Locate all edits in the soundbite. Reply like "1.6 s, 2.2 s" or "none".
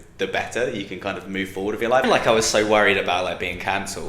2.0 s